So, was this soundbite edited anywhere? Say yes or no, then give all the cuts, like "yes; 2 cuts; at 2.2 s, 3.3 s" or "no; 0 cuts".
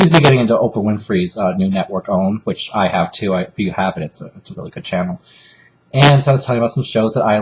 yes; 1 cut; at 4.1 s